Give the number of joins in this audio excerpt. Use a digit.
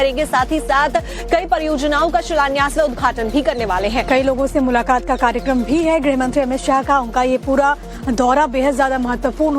1